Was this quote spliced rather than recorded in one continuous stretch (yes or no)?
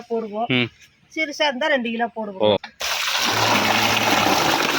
yes